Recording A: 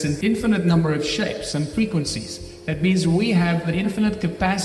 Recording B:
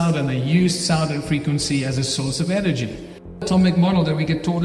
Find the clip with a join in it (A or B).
B